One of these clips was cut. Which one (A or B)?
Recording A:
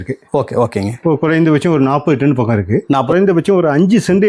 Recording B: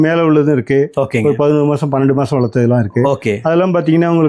A